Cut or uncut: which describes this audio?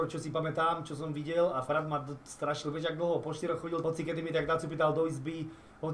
uncut